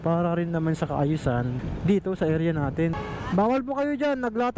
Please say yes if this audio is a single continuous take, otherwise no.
no